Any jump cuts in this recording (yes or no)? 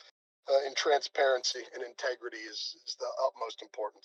no